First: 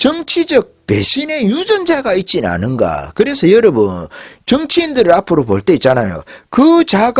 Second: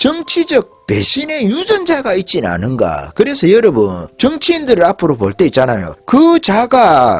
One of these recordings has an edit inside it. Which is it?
second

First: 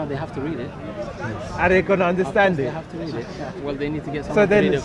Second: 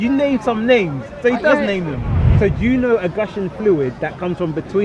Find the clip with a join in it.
second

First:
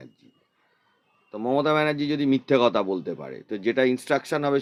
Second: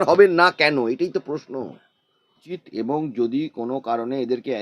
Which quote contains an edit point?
second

